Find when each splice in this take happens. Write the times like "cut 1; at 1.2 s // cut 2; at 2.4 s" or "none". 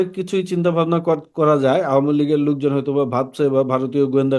none